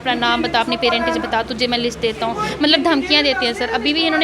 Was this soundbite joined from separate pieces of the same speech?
no; 0 cuts

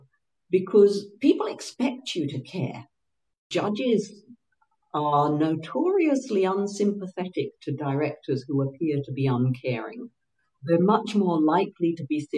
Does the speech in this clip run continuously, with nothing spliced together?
no; 2 cuts; at 3.4 s, 10.5 s

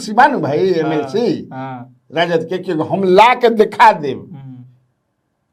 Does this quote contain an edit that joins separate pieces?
no; 0 cuts

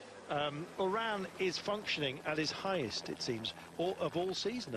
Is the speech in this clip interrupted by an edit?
no; 0 cuts

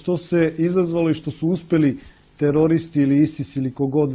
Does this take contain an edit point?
no; 0 cuts

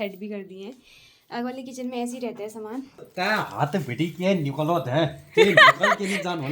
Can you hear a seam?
yes; 1 cut; at 3.1 s

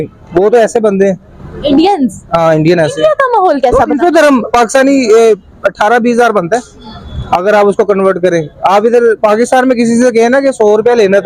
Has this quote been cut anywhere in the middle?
yes; 1 cut; at 2.7 s

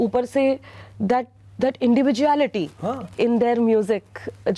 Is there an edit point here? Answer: no; 0 cuts

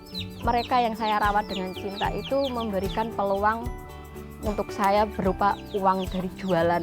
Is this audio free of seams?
yes; 0 cuts

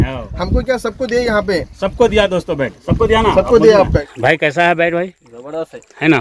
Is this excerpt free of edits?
no; 1 cut; at 4.1 s

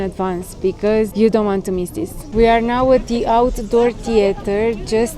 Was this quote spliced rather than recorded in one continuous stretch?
yes; 2 cuts; at 1.1 s, 2.2 s

